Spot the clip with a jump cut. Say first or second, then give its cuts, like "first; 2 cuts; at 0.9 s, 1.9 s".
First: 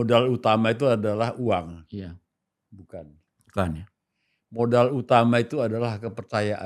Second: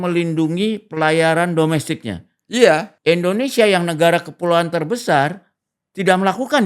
second; 1 cut; at 2.9 s